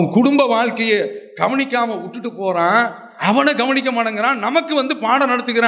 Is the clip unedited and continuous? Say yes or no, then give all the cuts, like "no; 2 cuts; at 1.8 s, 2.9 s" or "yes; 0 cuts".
yes; 0 cuts